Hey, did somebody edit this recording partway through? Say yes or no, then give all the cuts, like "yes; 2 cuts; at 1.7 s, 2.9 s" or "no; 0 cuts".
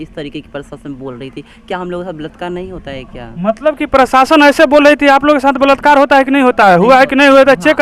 no; 0 cuts